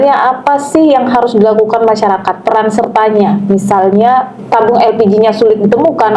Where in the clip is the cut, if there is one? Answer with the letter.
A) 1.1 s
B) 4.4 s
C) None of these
B